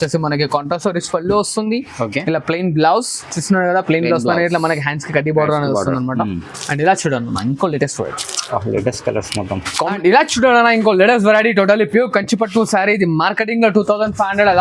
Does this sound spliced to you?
yes; 1 cut; at 9.9 s

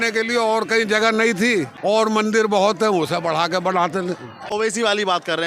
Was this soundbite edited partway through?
yes; 2 cuts; at 1.9 s, 4.4 s

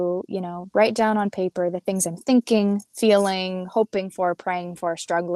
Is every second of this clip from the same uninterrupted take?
yes; 0 cuts

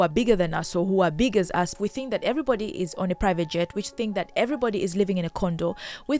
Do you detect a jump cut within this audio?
yes; 1 cut; at 1.7 s

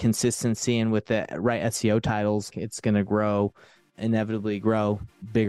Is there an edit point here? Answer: yes; 1 cut; at 2.5 s

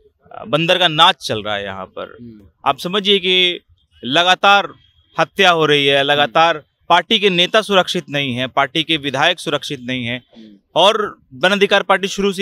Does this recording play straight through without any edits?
yes; 0 cuts

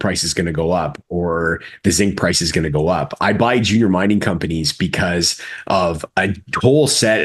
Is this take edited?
no; 0 cuts

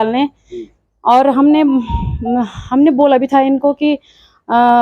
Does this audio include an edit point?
no; 0 cuts

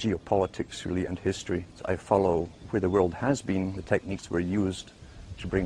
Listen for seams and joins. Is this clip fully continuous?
yes; 0 cuts

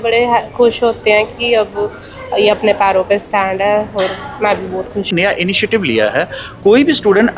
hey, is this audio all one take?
no; 1 cut; at 5.1 s

